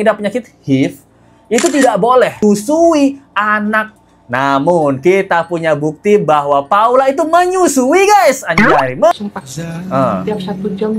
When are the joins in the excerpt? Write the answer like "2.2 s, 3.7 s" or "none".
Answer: 2.4 s, 3.9 s, 9.1 s